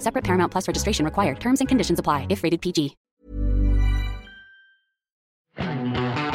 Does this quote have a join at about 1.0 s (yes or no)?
no